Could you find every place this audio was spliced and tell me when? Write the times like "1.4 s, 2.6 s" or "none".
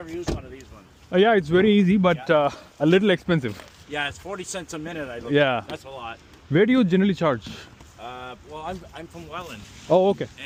none